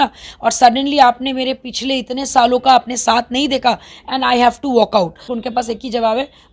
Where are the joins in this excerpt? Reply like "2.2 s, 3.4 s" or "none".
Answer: 5.3 s